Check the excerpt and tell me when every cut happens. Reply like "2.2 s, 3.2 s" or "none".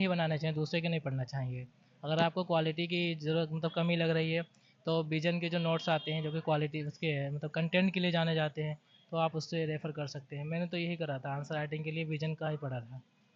none